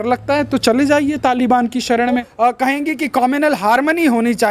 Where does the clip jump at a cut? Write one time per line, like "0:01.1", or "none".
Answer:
0:02.3